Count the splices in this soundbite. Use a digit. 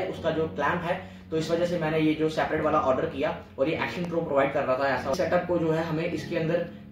1